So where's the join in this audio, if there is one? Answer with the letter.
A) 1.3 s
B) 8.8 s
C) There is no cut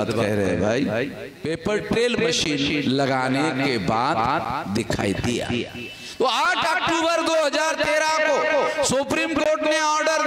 A